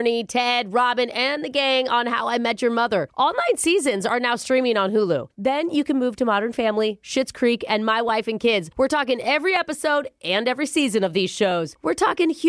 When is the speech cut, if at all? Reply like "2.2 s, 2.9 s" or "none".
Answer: none